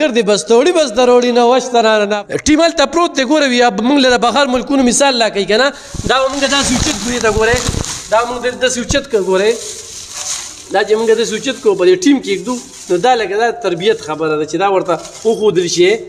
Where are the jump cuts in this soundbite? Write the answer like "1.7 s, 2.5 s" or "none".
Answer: 2.2 s